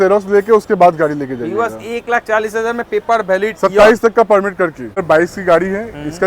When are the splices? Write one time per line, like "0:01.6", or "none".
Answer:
0:05.0